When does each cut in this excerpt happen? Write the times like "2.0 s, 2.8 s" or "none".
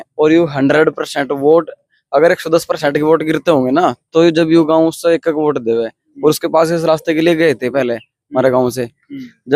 none

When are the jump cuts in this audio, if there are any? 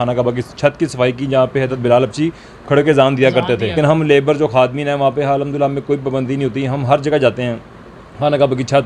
3.8 s

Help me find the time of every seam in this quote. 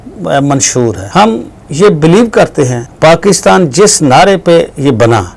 1.0 s, 2.8 s

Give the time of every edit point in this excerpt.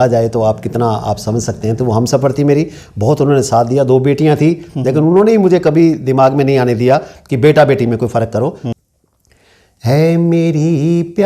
8.7 s

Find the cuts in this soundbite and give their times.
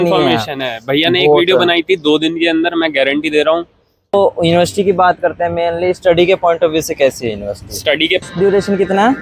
4.1 s, 8.3 s

